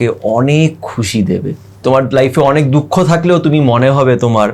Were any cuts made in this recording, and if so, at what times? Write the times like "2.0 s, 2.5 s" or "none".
1.8 s